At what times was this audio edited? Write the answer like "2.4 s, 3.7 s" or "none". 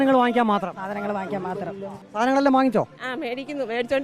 2.0 s